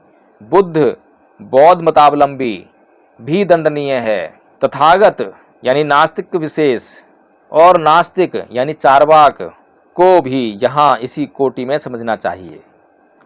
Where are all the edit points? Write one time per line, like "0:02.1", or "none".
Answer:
none